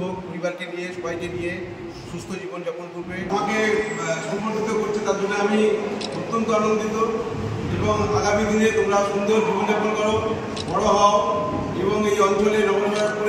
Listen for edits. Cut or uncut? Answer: cut